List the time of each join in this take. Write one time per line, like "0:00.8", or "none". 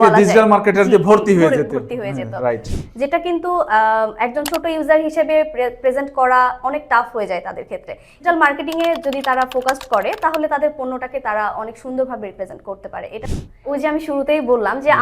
0:02.7
0:08.1
0:13.6

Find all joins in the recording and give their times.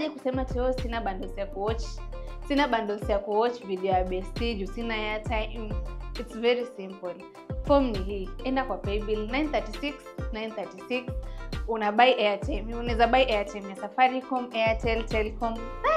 none

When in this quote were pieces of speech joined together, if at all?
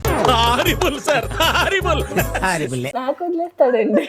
0:02.8

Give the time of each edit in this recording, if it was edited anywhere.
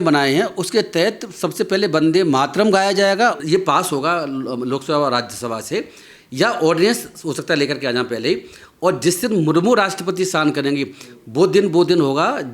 0:03.4

